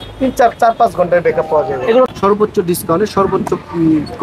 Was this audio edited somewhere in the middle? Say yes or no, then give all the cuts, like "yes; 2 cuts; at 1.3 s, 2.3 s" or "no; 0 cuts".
yes; 1 cut; at 2.1 s